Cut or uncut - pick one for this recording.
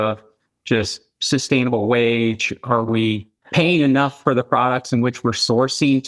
uncut